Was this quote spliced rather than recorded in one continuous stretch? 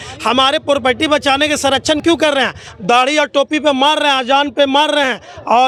no; 0 cuts

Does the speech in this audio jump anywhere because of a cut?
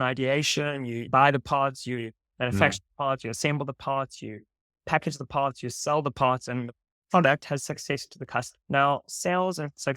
yes; 2 cuts; at 1.0 s, 8.6 s

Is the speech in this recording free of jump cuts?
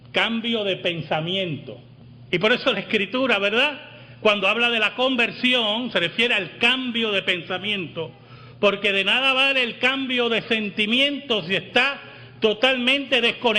yes; 0 cuts

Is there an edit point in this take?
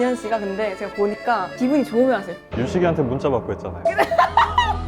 yes; 2 cuts; at 1.5 s, 2.4 s

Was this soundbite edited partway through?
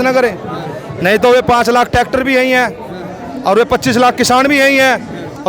no; 0 cuts

